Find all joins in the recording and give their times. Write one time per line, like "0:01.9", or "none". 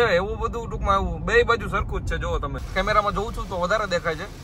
0:02.6